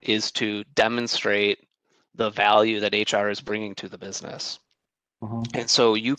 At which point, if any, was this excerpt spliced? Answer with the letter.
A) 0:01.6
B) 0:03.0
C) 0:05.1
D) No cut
D